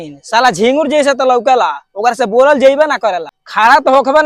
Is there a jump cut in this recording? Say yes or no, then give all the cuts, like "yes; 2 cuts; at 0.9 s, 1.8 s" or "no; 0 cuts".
no; 0 cuts